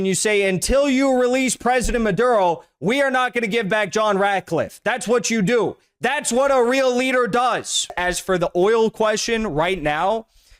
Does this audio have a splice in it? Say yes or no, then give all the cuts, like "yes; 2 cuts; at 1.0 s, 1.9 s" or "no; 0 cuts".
yes; 1 cut; at 7.9 s